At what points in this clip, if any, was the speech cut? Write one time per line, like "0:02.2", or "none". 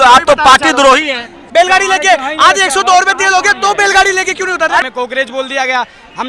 0:01.4
0:04.8